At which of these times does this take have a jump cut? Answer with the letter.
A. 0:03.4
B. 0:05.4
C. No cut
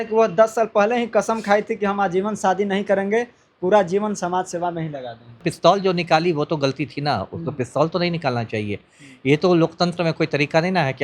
B